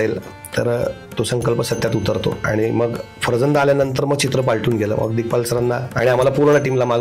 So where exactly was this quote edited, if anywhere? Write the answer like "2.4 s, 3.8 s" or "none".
none